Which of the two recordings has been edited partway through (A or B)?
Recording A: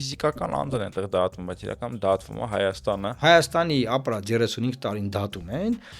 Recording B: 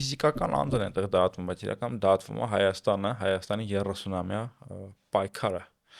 A